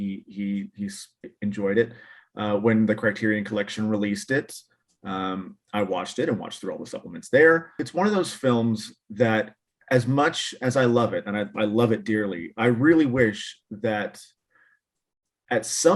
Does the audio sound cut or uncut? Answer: cut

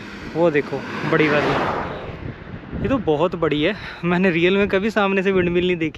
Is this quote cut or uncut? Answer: uncut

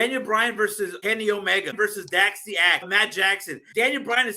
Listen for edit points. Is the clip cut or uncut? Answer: cut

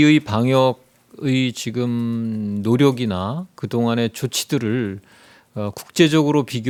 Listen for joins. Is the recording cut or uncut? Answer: uncut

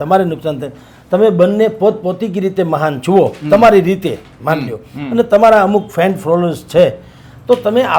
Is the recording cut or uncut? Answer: uncut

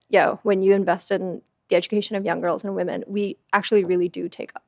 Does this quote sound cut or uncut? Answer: uncut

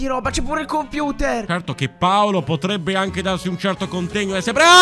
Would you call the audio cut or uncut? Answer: cut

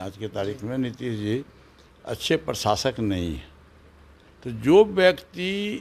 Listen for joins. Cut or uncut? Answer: uncut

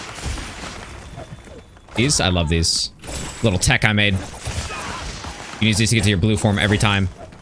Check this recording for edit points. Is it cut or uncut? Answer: uncut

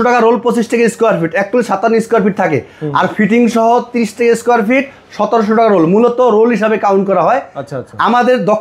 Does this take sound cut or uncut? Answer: uncut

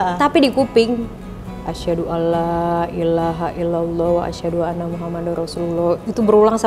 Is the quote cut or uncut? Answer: uncut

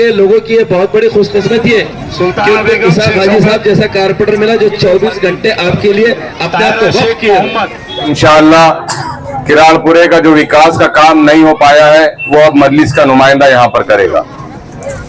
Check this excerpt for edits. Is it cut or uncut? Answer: cut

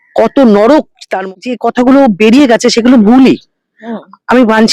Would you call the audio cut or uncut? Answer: cut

